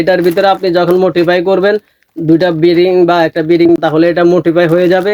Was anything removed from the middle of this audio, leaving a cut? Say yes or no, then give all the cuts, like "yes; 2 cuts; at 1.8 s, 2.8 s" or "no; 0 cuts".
yes; 1 cut; at 3.8 s